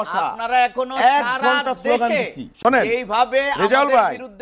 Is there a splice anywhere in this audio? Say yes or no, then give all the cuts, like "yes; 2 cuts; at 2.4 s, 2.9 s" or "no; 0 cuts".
no; 0 cuts